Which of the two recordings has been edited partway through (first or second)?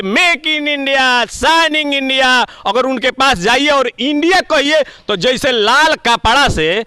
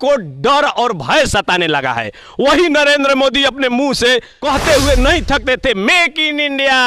second